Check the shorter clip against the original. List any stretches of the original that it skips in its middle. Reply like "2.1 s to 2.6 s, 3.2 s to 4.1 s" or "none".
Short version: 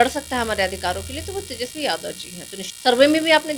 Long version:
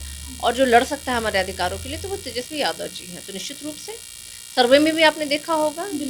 3.4 s to 4.3 s